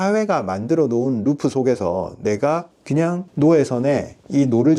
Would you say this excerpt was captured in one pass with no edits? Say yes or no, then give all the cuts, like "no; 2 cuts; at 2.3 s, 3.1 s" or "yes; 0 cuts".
yes; 0 cuts